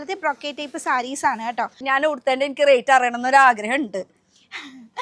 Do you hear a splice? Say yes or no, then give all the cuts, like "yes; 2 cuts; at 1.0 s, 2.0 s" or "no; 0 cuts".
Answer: yes; 1 cut; at 1.8 s